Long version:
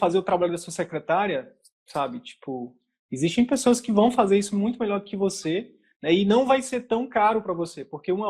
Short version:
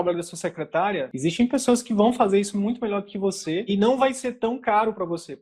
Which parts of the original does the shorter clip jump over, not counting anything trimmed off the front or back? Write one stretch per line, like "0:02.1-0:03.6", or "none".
0:01.5-0:03.1
0:05.7-0:06.2